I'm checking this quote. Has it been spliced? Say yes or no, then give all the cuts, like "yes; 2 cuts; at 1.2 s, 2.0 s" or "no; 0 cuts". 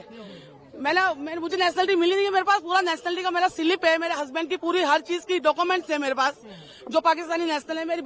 no; 0 cuts